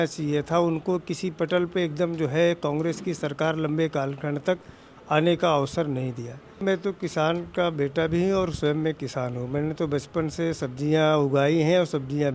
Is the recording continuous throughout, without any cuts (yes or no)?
no